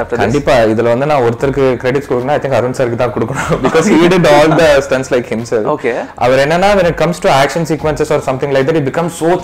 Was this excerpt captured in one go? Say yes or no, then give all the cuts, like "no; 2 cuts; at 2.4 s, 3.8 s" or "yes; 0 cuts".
yes; 0 cuts